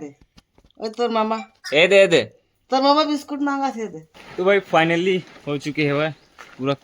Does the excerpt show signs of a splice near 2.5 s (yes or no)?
no